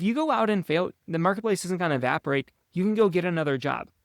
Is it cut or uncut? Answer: cut